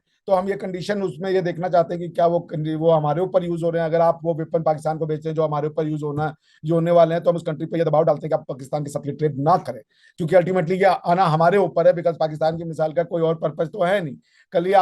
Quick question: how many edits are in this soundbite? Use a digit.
0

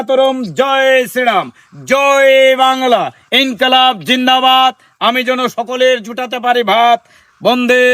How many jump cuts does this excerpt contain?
0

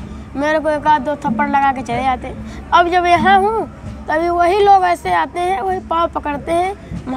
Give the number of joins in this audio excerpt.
0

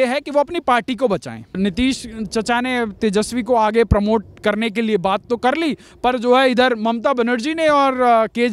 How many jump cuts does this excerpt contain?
1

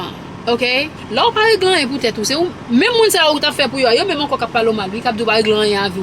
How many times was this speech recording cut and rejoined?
1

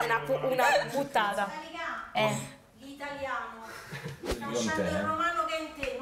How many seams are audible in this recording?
0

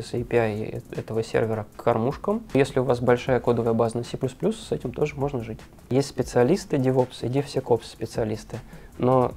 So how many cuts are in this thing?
2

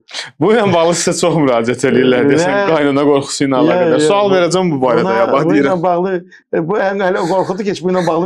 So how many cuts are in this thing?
0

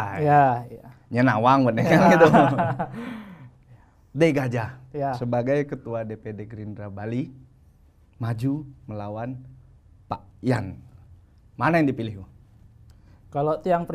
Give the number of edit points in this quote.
0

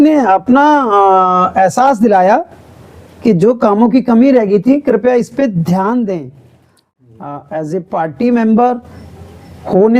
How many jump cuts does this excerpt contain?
1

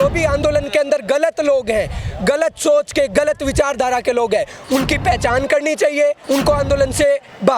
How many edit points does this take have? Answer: 1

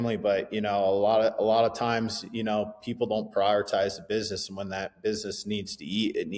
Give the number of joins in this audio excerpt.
0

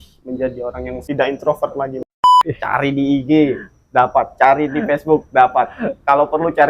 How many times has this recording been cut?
2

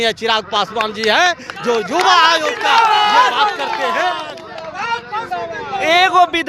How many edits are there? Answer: 0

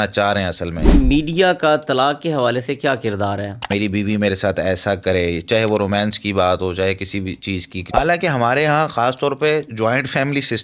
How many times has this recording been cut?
3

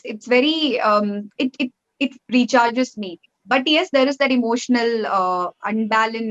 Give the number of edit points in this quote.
0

